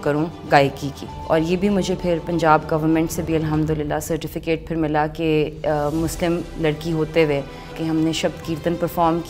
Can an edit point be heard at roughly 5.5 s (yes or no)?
no